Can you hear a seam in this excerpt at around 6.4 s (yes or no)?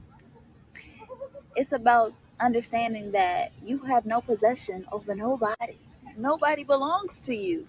yes